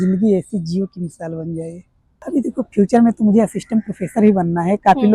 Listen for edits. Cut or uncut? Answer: cut